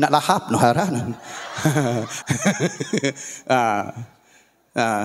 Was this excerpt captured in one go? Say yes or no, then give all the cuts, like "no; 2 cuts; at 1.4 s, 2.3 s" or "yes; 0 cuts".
no; 1 cut; at 2.1 s